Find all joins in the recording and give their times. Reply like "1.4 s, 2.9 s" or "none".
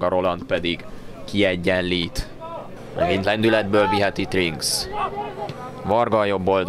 0.9 s